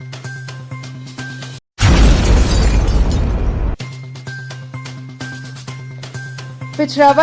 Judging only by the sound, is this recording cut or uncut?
cut